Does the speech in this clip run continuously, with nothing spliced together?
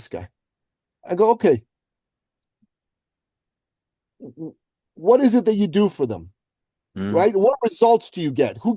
yes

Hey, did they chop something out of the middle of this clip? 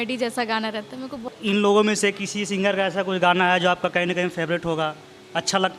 yes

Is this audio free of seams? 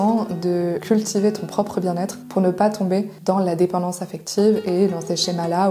no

